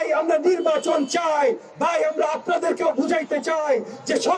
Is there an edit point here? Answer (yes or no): no